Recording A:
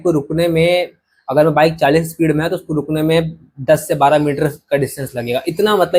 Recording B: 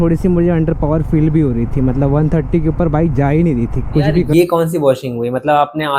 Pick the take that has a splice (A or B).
B